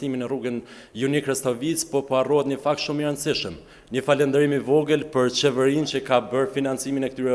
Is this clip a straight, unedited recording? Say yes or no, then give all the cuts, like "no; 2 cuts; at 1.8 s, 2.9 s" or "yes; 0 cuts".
yes; 0 cuts